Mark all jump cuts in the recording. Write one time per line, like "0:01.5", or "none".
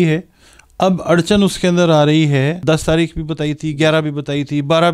0:02.6